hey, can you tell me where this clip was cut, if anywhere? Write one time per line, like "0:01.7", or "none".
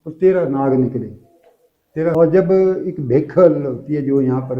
0:02.1